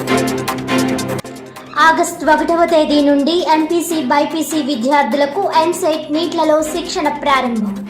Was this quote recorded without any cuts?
no; 1 cut; at 1.0 s

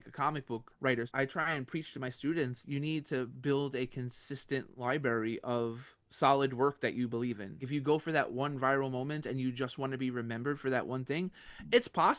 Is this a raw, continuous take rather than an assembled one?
no; 3 cuts; at 1.1 s, 2.6 s, 7.6 s

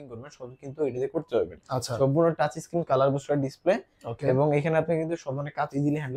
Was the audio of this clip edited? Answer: no; 0 cuts

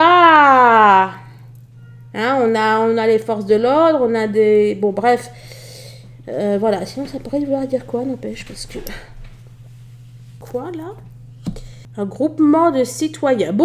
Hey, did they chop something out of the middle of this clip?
yes; 1 cut; at 10.4 s

